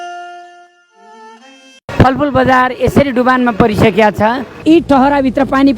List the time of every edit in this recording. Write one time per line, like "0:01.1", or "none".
0:01.9